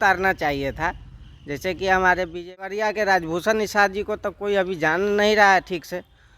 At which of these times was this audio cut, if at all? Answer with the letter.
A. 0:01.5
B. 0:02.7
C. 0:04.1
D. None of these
B